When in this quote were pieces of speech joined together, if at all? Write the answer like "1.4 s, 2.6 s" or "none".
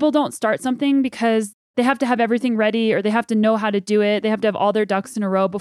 1.6 s